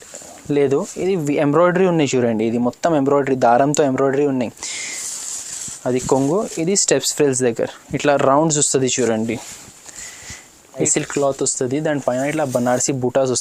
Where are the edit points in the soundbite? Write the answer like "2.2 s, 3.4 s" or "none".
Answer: 10.8 s